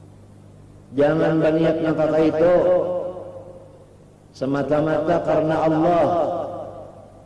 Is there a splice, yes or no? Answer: no